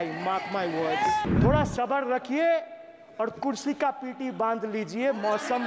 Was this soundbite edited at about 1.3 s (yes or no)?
yes